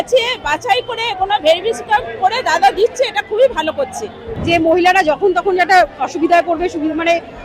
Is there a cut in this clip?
yes; 1 cut; at 4.3 s

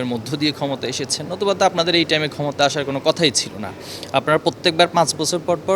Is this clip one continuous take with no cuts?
yes; 0 cuts

